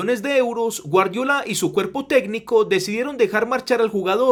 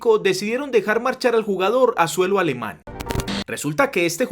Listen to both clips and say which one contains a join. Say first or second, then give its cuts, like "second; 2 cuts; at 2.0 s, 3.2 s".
second; 1 cut; at 3.0 s